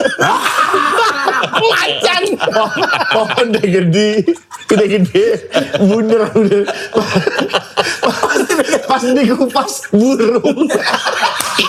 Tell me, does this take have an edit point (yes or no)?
no